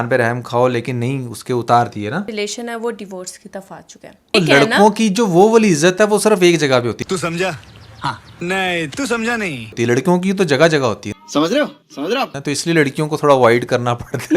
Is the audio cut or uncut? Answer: cut